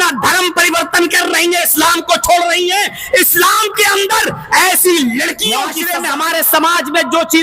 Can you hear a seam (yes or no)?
yes